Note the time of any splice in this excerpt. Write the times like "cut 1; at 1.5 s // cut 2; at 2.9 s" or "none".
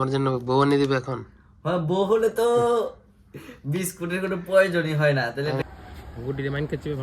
cut 1; at 5.6 s